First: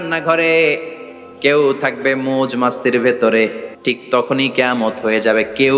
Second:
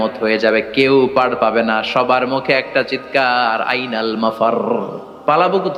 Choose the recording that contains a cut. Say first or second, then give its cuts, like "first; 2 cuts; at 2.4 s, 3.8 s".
first; 1 cut; at 3.7 s